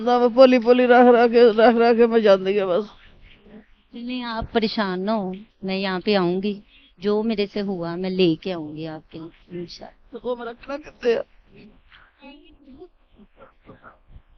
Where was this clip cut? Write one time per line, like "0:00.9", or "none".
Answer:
none